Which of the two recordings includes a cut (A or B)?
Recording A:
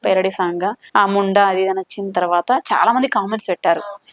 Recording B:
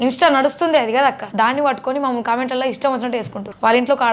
B